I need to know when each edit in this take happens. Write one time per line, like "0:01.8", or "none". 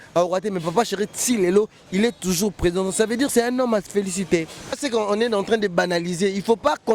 0:04.8